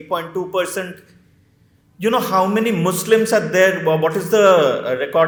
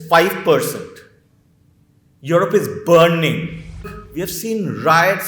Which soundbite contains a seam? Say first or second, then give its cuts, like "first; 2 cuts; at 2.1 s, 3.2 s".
second; 1 cut; at 4.0 s